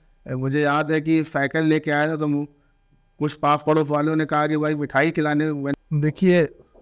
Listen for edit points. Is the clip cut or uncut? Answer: cut